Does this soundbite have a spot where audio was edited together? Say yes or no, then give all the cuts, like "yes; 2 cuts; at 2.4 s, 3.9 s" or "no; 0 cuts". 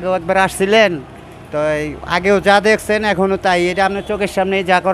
no; 0 cuts